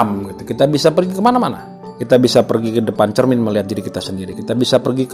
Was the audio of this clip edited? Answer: no; 0 cuts

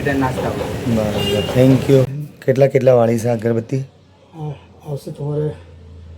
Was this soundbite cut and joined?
yes; 1 cut; at 2.2 s

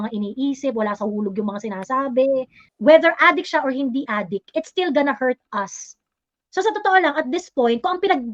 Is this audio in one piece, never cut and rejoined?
no; 1 cut; at 2.6 s

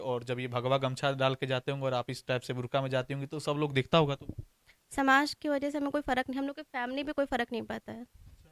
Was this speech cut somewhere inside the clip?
no; 0 cuts

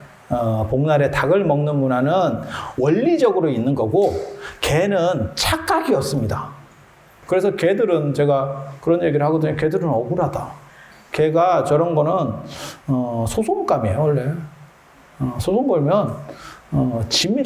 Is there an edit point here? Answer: yes; 1 cut; at 7.1 s

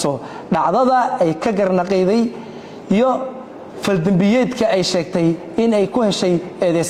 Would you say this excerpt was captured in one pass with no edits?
yes; 0 cuts

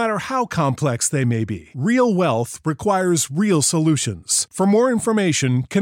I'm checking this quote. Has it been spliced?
no; 0 cuts

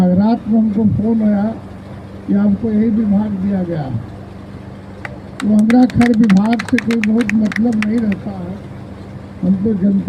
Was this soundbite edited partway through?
no; 0 cuts

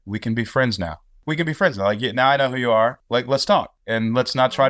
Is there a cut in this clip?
yes; 3 cuts; at 1.2 s, 3.0 s, 3.8 s

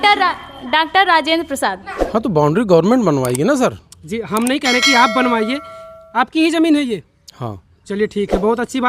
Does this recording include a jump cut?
yes; 1 cut; at 1.9 s

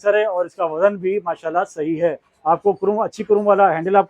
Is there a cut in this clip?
no; 0 cuts

